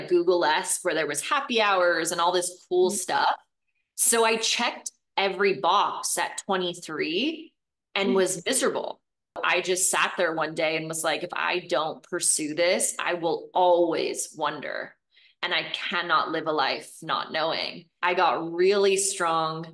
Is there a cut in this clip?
yes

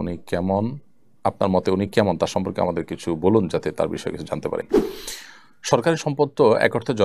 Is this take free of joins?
no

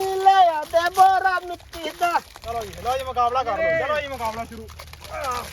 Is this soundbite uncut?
no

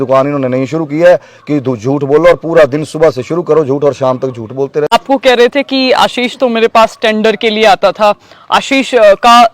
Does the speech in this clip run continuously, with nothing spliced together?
no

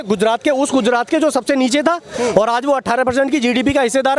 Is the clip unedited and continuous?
yes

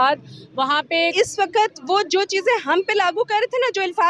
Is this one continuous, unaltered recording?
no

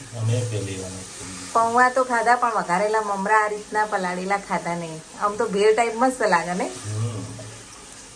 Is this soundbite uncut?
yes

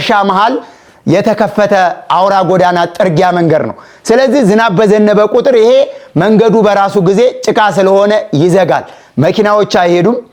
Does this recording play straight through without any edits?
yes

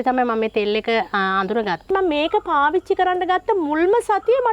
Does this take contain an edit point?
yes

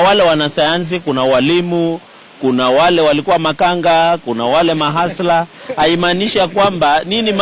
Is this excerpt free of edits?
yes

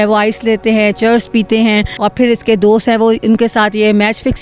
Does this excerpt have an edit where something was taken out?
yes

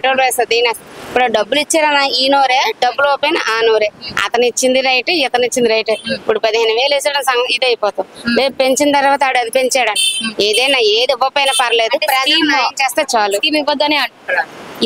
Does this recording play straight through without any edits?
yes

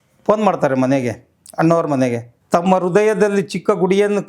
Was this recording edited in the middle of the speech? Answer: yes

